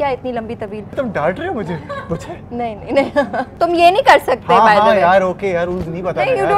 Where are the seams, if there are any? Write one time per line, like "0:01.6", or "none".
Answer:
0:01.0
0:03.5

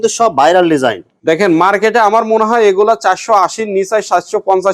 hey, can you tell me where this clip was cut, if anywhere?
0:01.1

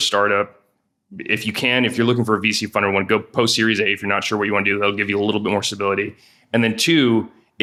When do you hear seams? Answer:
none

